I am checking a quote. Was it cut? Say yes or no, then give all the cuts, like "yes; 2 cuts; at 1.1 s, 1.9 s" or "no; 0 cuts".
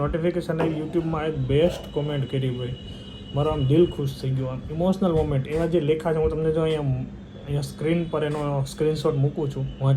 no; 0 cuts